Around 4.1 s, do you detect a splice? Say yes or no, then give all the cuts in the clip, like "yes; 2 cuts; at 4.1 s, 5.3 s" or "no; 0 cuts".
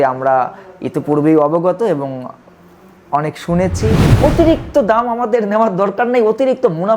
yes; 1 cut; at 4.1 s